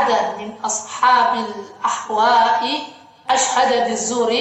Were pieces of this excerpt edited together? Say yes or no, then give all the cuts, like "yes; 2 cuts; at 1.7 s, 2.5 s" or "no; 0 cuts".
yes; 1 cut; at 3.3 s